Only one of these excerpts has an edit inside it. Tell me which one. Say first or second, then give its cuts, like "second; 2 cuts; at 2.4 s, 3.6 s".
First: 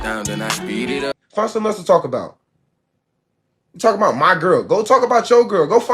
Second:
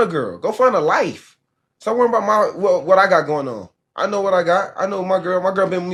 first; 1 cut; at 1.2 s